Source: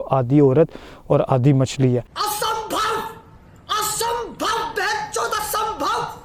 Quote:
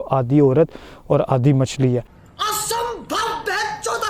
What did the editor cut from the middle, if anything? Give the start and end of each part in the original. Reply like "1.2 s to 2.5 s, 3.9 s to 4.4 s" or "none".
2.1 s to 3.4 s